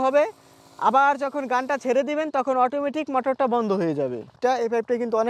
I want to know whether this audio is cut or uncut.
cut